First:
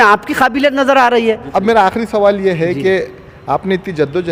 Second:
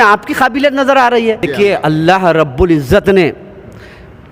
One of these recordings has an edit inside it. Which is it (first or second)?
second